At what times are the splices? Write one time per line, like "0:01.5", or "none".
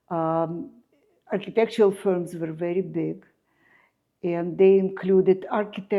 none